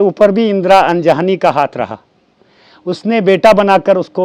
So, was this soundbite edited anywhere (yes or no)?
no